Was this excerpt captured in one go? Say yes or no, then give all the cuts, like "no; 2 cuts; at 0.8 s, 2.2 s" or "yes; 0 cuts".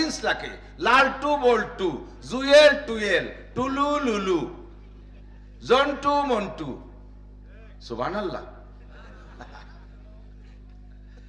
yes; 0 cuts